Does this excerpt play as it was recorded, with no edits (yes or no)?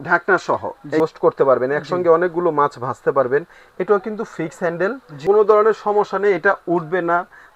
no